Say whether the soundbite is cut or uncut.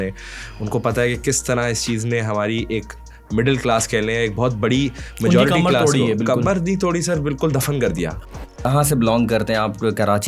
cut